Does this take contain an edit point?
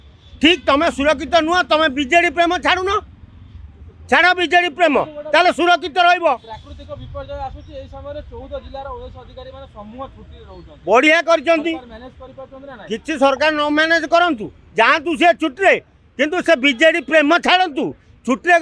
no; 0 cuts

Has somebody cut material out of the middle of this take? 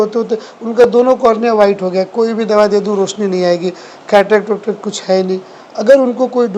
no; 0 cuts

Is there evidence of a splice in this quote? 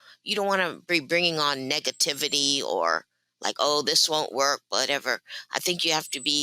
no; 0 cuts

